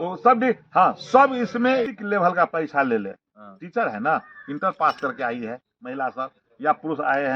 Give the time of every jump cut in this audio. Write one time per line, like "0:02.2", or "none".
0:01.9